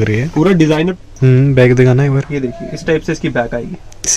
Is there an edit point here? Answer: yes; 1 cut; at 0.9 s

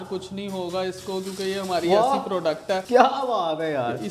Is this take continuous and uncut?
no; 1 cut; at 2.8 s

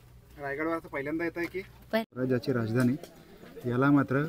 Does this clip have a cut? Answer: yes; 1 cut; at 2.1 s

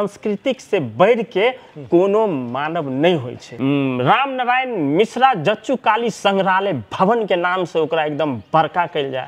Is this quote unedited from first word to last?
no; 1 cut; at 3.4 s

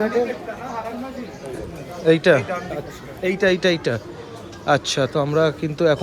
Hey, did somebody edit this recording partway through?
no; 0 cuts

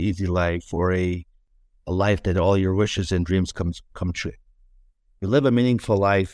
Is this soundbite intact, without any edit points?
yes; 0 cuts

